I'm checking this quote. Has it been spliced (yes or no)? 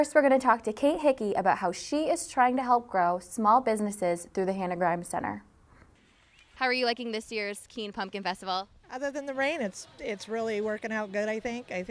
yes